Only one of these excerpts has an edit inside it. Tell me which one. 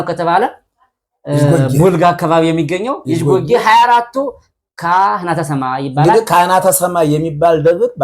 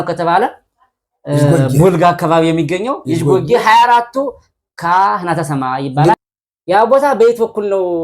second; 1 cut; at 6.1 s

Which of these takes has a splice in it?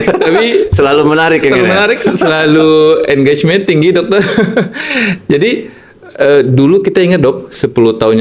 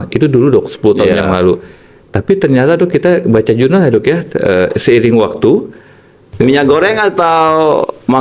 second; 1 cut; at 6.1 s

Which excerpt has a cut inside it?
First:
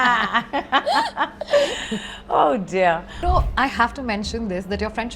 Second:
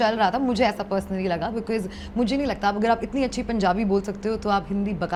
first; 1 cut; at 3.2 s

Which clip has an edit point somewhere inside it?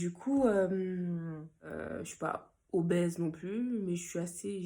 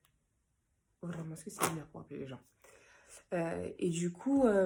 first; 1 cut; at 1.7 s

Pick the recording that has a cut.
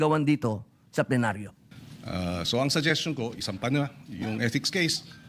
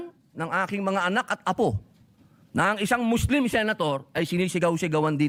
first; 1 cut; at 1.5 s

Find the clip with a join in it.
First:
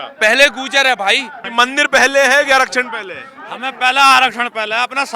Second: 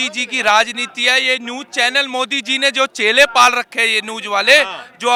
first; 1 cut; at 1.4 s

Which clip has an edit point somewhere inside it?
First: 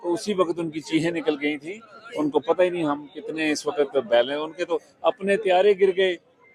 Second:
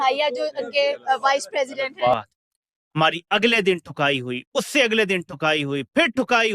second; 1 cut; at 2.1 s

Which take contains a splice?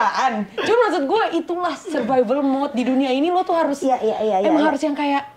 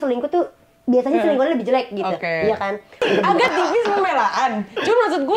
second; 1 cut; at 3.1 s

